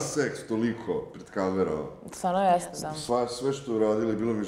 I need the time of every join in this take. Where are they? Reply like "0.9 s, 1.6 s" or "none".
none